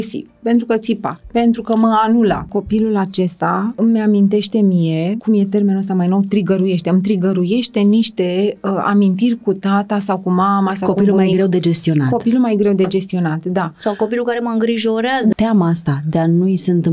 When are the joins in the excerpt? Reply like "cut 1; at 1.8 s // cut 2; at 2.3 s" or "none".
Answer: cut 1; at 2.5 s // cut 2; at 3.8 s // cut 3; at 5.2 s // cut 4; at 15.3 s